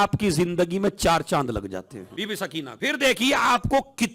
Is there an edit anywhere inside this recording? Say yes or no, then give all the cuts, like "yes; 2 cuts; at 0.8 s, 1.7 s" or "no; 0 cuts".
yes; 2 cuts; at 1.9 s, 2.7 s